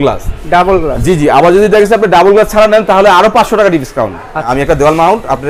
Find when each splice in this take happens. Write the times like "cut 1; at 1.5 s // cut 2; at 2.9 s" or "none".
cut 1; at 4.5 s